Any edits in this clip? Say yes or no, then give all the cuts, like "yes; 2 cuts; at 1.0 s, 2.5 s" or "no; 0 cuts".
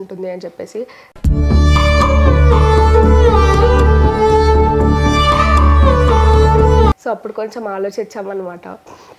no; 0 cuts